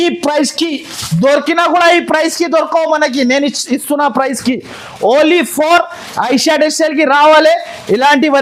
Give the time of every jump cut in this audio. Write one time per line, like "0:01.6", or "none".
none